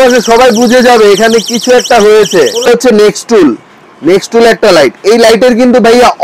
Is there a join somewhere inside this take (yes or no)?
yes